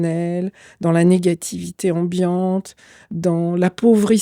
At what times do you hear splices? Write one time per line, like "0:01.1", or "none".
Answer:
none